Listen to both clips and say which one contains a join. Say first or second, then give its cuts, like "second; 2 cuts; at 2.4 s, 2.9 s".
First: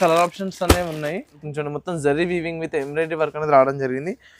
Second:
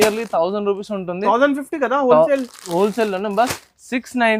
first; 1 cut; at 1.5 s